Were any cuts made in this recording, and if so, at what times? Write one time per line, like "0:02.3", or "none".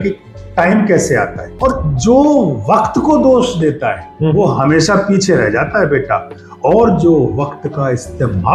0:01.5

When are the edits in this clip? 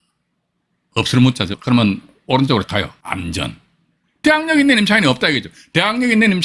0:01.5
0:02.7

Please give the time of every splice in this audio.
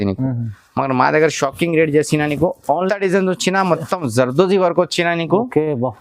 0:02.9

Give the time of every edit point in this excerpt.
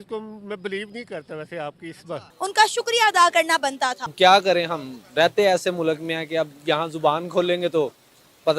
0:02.2
0:04.1

